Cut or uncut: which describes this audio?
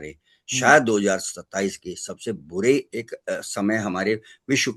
uncut